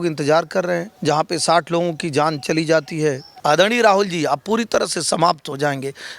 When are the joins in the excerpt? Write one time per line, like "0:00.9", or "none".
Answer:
0:00.9
0:03.3